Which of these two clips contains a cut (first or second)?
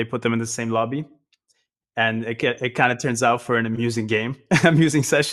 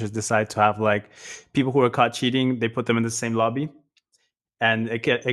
first